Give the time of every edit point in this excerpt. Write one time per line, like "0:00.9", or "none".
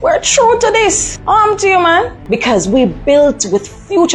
0:02.2

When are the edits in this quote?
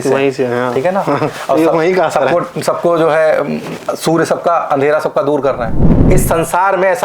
0:06.0

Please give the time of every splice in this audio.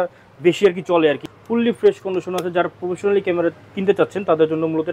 0:01.2

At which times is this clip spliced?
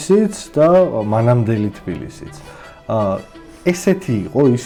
none

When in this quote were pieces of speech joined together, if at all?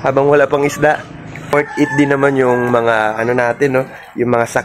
0:01.5

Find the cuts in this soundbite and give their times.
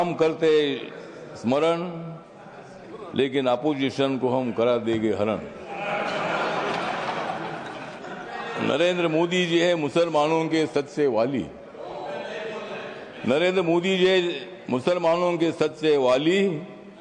none

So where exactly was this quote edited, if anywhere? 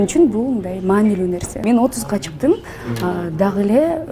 0:01.5

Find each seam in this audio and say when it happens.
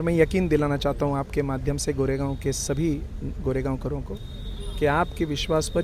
none

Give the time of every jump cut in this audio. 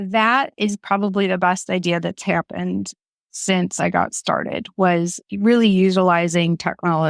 none

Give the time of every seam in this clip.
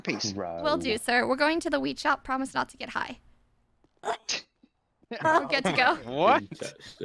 none

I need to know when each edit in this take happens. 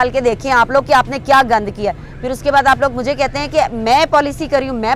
none

